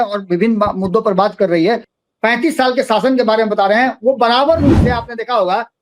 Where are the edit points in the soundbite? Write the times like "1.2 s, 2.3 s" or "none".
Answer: 1.9 s

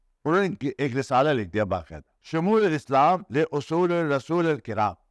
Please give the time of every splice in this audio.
2.1 s

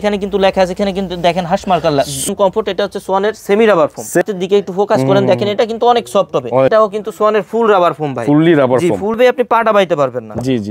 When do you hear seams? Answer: 2.3 s, 4.2 s, 6.7 s, 9.2 s

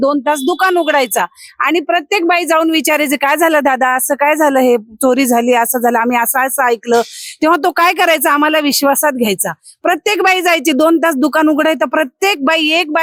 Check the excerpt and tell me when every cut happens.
none

